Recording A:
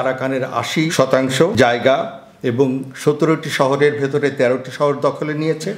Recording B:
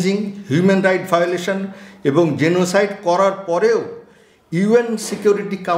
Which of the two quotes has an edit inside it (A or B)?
A